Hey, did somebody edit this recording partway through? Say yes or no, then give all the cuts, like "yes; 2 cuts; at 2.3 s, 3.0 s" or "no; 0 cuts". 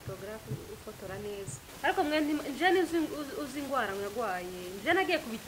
yes; 1 cut; at 1.6 s